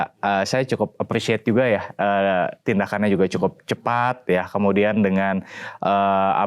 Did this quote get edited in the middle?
no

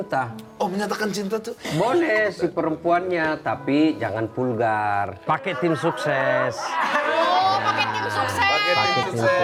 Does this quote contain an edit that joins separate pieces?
no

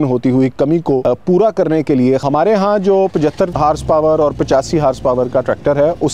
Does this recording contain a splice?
yes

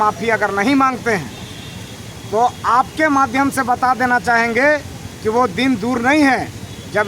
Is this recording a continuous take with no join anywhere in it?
yes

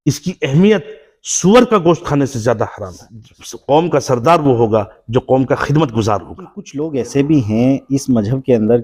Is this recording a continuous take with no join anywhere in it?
no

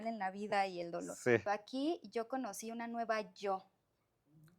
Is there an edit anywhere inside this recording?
yes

